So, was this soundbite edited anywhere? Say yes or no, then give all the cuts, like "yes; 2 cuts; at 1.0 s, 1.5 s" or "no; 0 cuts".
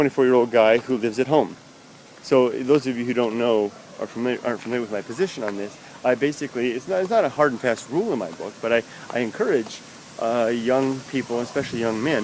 no; 0 cuts